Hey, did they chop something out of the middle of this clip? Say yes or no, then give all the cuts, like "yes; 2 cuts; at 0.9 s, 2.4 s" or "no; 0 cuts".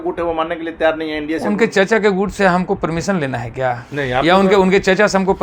no; 0 cuts